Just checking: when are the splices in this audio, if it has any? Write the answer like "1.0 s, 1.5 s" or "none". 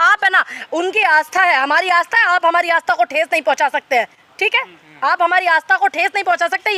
none